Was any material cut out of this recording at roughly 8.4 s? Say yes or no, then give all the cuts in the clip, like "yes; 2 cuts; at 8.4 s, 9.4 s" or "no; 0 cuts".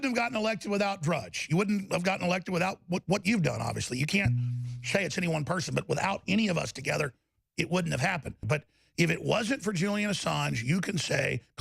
yes; 1 cut; at 8.4 s